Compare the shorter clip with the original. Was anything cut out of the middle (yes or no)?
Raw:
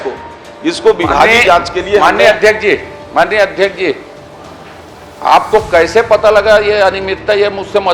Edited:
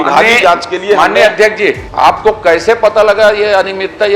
yes